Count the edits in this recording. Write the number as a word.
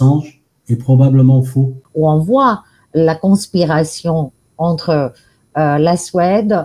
one